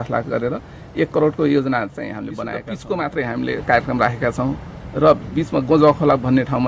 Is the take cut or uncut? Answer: cut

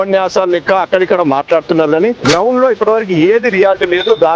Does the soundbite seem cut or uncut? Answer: cut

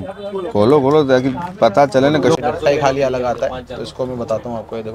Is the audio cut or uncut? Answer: cut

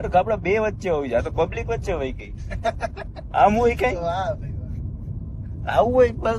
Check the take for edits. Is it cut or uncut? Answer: uncut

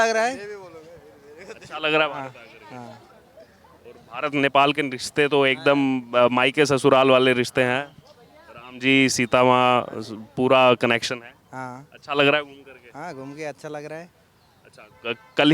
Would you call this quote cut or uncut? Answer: uncut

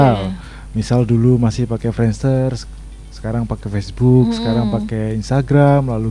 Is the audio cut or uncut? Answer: uncut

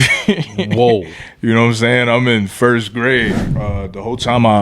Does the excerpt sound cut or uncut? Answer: cut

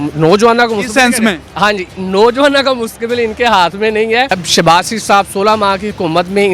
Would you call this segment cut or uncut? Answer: cut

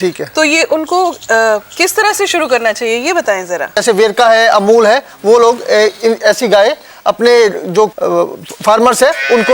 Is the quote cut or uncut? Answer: cut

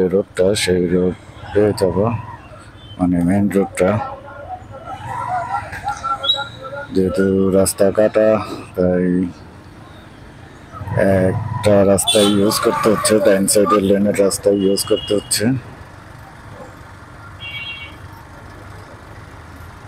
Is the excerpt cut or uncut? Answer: uncut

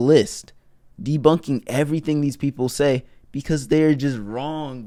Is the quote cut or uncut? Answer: uncut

